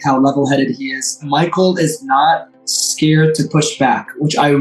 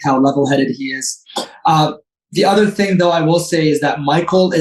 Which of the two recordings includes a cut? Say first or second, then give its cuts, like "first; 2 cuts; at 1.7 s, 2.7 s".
first; 1 cut; at 1.2 s